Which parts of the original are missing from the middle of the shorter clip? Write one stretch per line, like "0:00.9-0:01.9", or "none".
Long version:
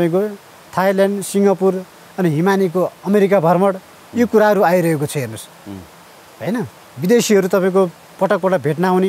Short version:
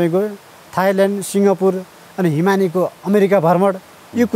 none